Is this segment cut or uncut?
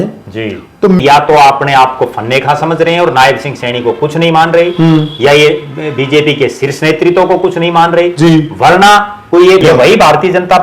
cut